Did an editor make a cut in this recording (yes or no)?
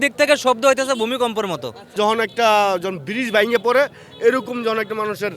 yes